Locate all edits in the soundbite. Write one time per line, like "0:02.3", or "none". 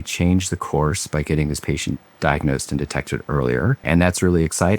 0:03.8